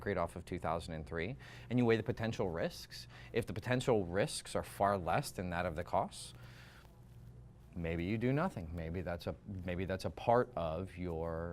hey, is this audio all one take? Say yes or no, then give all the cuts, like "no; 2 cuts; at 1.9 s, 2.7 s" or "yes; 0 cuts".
no; 1 cut; at 6.7 s